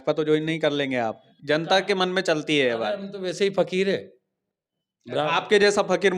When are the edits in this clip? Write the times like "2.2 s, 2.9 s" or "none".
1.3 s